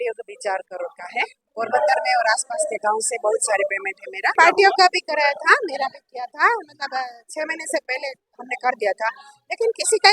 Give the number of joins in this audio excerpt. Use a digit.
1